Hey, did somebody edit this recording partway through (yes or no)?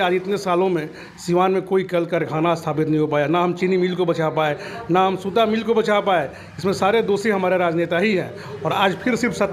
no